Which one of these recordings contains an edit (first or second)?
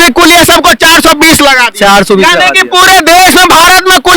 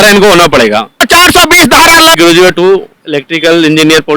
second